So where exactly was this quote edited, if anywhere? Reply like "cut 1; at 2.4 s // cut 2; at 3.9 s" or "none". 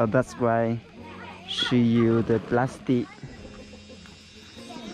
none

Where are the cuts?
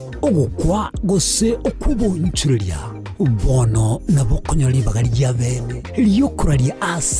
none

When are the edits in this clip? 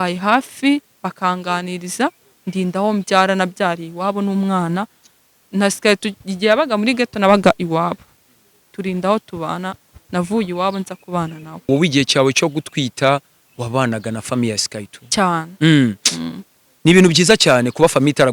cut 1; at 11.7 s

